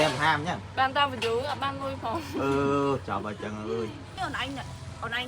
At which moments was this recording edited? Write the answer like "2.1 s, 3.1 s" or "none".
4.2 s